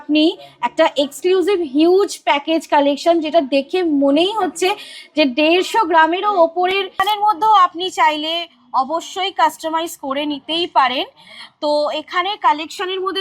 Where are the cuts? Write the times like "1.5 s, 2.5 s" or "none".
7.0 s